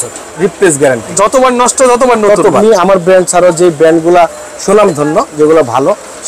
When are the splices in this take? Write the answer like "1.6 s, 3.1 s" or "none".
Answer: 2.6 s